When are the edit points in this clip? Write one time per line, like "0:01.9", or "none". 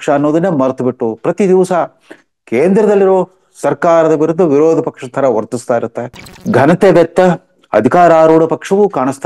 0:06.3